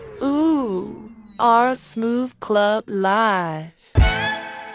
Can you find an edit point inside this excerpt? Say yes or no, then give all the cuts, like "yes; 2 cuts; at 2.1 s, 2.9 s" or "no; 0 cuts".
no; 0 cuts